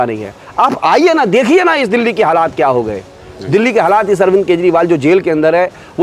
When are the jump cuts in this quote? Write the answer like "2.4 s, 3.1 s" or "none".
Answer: none